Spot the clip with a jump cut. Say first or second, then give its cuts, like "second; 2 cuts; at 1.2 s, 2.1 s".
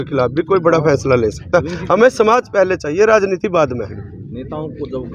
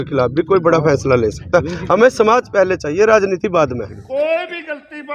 second; 1 cut; at 4.0 s